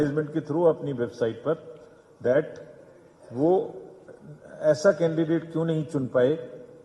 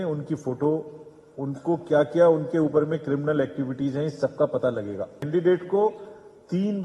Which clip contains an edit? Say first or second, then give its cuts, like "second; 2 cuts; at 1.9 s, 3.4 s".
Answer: second; 1 cut; at 5.2 s